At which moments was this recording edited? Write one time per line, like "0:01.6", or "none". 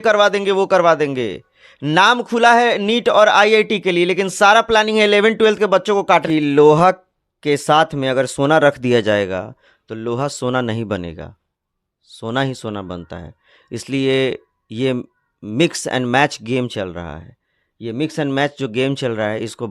0:06.3